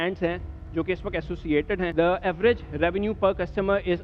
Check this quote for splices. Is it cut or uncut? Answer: cut